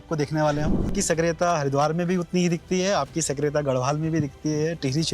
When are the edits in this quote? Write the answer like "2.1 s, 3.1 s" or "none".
0.9 s